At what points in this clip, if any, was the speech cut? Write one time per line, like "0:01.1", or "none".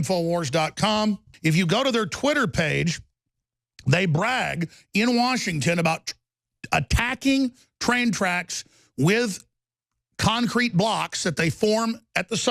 0:01.3